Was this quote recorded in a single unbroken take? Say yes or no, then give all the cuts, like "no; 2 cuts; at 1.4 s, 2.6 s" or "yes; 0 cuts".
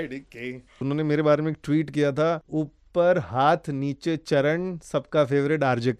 no; 2 cuts; at 0.8 s, 2.4 s